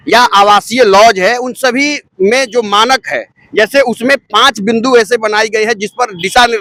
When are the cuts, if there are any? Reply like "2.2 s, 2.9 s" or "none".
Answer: none

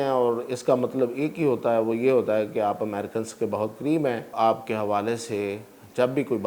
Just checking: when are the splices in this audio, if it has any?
4.3 s

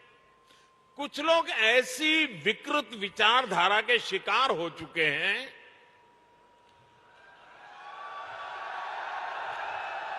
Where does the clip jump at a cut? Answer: none

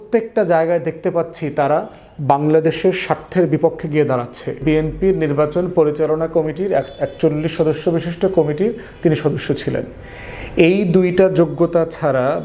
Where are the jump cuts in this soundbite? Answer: 4.6 s

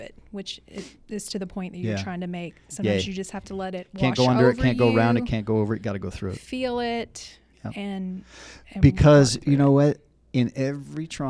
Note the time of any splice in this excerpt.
none

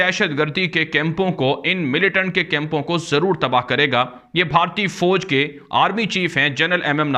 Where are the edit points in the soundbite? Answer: none

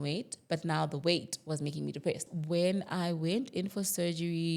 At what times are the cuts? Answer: 2.2 s

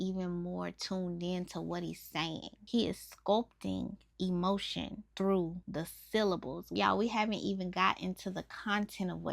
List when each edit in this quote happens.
2.5 s, 5.0 s, 5.6 s, 6.6 s

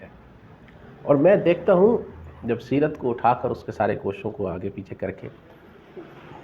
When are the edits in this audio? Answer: none

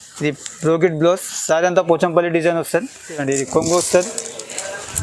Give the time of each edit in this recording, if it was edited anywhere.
3.2 s

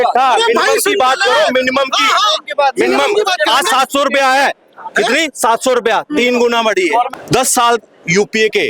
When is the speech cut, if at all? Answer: 7.1 s

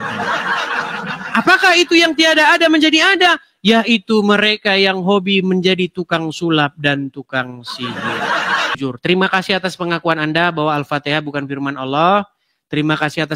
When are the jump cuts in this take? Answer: 8.7 s

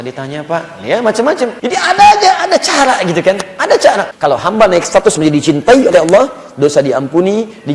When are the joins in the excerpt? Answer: 1.6 s, 4.1 s

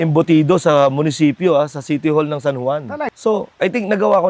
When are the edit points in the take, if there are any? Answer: 3.1 s

